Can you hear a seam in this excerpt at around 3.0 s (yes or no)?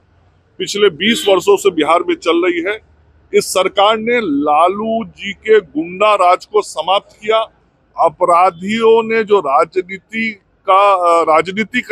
no